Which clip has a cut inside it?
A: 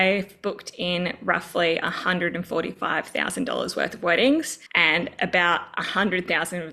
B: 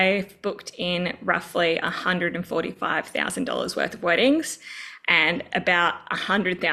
A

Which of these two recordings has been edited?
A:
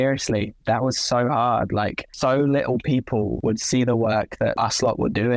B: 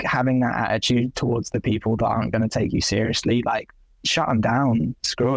A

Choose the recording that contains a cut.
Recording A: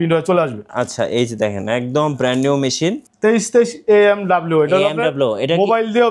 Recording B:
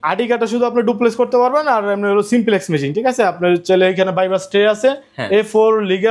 A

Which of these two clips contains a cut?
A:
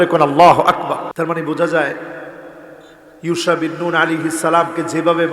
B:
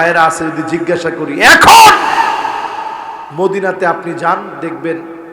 A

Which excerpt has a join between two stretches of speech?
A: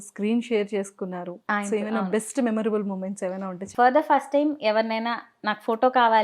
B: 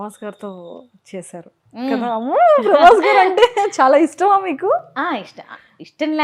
A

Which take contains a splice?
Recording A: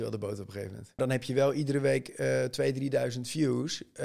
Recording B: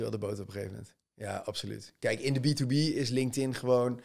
A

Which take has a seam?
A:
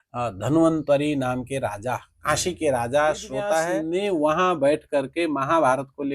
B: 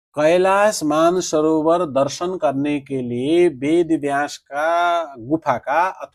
A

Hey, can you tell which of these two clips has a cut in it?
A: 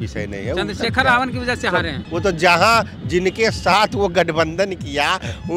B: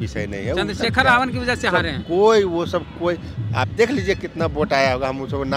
A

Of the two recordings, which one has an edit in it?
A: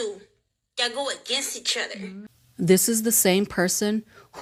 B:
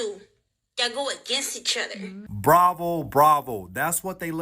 B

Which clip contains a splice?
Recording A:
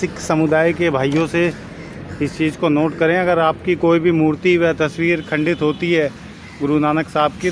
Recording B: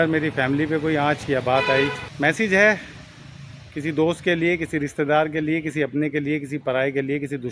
B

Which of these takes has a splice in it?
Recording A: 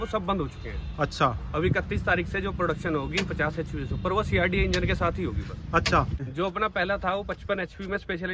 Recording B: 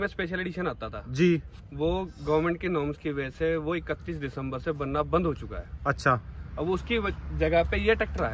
A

